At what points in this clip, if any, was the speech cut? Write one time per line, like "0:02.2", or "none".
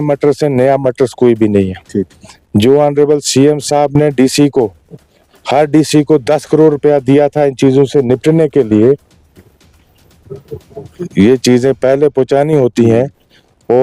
none

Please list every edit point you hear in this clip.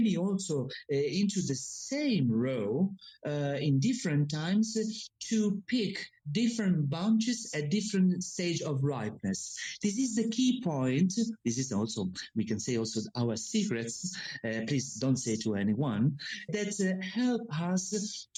none

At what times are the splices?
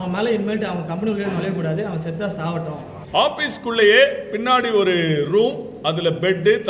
0:02.9

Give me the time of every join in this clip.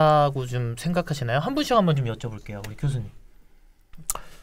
none

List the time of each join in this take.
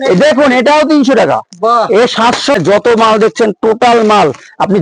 0:02.6

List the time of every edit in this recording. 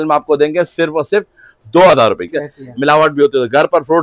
0:02.3

